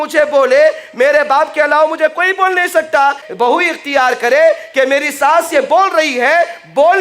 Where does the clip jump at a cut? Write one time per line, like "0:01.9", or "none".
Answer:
0:03.3